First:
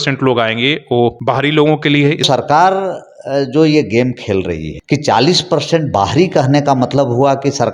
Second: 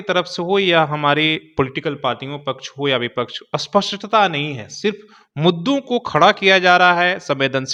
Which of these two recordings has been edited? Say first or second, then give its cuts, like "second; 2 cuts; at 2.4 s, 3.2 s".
first; 3 cuts; at 1.2 s, 2.2 s, 4.7 s